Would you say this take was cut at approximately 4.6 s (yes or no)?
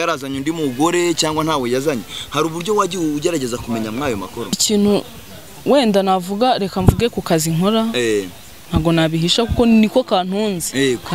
yes